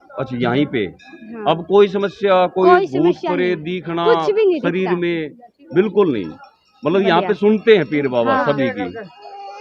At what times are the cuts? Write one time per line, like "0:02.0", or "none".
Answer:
none